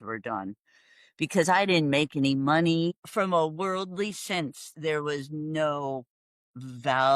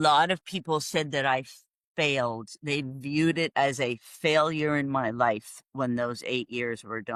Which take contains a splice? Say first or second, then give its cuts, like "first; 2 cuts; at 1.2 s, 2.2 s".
first; 1 cut; at 3.0 s